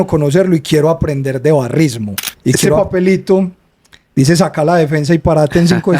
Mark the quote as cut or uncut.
cut